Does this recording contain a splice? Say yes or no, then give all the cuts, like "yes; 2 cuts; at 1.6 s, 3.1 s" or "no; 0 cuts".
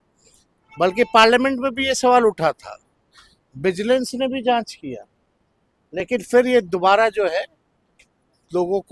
no; 0 cuts